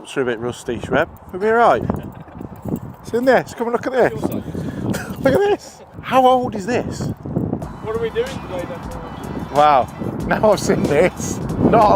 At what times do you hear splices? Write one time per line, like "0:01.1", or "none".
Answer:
none